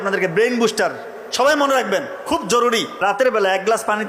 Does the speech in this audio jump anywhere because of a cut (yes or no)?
yes